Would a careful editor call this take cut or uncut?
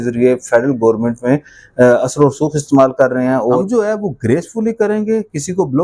cut